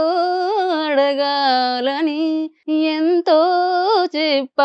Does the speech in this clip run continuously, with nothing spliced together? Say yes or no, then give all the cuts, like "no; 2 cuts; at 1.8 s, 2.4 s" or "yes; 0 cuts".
no; 1 cut; at 2.6 s